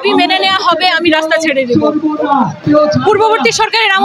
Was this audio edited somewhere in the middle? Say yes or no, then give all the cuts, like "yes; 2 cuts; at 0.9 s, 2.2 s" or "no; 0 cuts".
yes; 1 cut; at 2.6 s